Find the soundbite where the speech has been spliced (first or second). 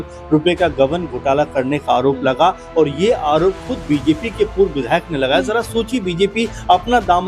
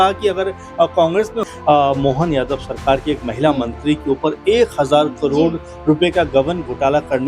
second